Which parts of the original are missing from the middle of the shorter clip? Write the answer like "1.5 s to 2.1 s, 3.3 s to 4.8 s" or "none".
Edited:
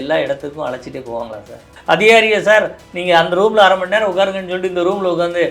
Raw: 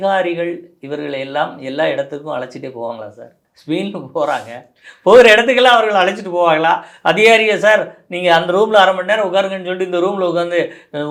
3.4 s to 6.9 s